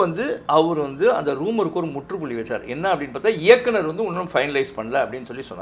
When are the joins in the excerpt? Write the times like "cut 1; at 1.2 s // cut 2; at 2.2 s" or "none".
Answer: none